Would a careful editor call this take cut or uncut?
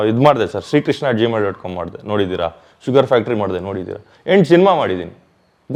uncut